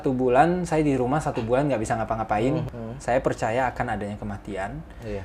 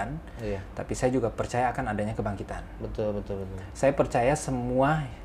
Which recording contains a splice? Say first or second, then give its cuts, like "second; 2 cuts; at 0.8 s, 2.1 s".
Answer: first; 1 cut; at 2.7 s